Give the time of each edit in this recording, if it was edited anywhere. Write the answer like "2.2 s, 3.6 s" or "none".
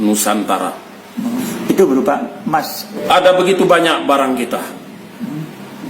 1.4 s, 3.0 s